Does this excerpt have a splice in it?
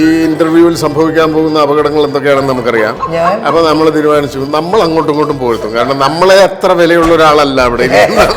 no; 0 cuts

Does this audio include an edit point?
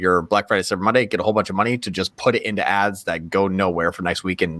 no; 0 cuts

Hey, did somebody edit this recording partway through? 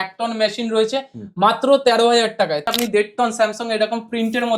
yes; 1 cut; at 2.7 s

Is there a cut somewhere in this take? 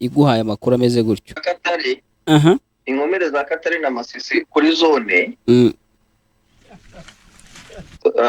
yes; 1 cut; at 1.4 s

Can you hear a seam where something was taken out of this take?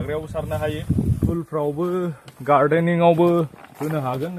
yes; 1 cut; at 1.3 s

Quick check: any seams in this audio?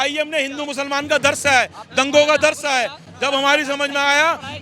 no; 0 cuts

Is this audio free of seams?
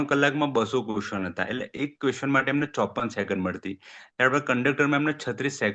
yes; 0 cuts

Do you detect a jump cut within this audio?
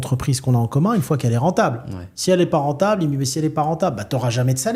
no; 0 cuts

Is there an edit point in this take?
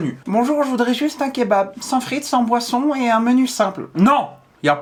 no; 0 cuts

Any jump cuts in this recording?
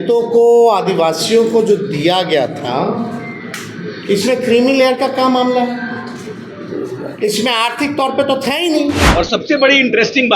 yes; 1 cut; at 9.0 s

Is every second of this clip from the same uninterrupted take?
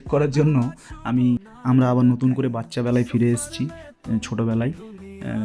no; 1 cut; at 1.4 s

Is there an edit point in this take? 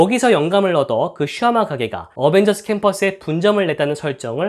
no; 0 cuts

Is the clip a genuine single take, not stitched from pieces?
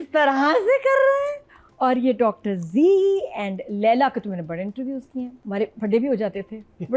no; 1 cut; at 5.4 s

